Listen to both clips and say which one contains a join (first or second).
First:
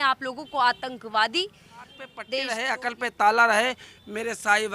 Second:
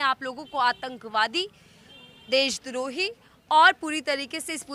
first